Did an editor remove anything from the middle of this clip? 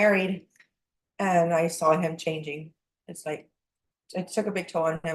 no; 0 cuts

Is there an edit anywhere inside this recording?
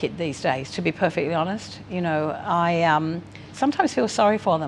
no; 0 cuts

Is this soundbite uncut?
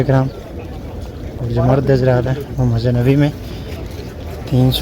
no; 1 cut; at 1.4 s

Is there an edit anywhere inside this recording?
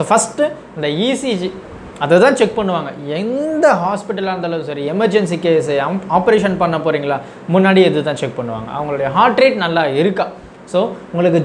no; 0 cuts

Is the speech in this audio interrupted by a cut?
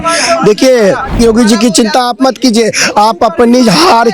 yes; 1 cut; at 1.2 s

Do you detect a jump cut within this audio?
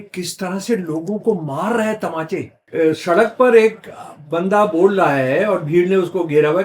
yes; 1 cut; at 2.6 s

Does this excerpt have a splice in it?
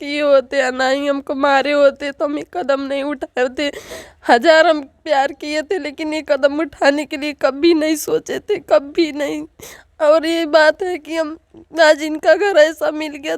no; 0 cuts

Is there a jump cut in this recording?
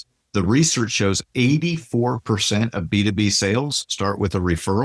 no; 0 cuts

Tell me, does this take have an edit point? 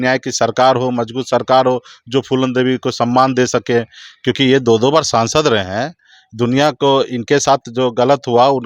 no; 0 cuts

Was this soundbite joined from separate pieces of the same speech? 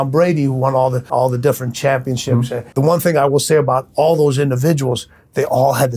yes; 2 cuts; at 1.1 s, 2.6 s

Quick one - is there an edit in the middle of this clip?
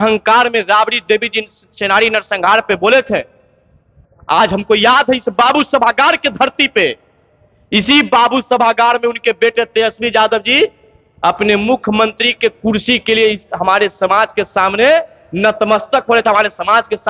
no; 0 cuts

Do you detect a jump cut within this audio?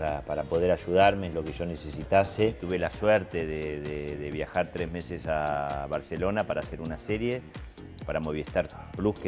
yes; 1 cut; at 2.6 s

